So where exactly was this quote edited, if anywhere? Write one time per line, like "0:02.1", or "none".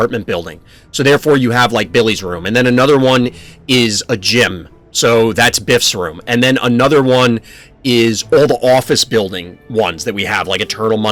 none